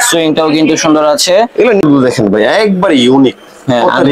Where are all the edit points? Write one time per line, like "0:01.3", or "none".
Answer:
0:01.8